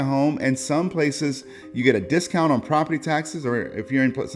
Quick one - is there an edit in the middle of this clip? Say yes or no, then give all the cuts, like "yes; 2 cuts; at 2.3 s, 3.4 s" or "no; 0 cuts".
no; 0 cuts